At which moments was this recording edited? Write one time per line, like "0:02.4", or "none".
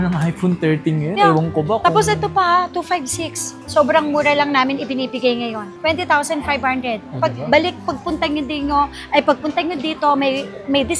none